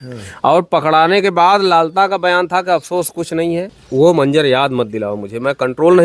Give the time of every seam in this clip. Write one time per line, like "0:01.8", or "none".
0:03.8